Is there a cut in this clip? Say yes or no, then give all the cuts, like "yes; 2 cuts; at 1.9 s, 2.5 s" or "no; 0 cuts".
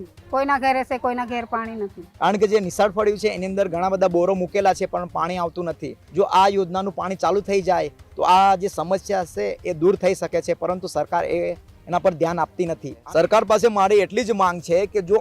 yes; 3 cuts; at 2.0 s, 5.9 s, 12.9 s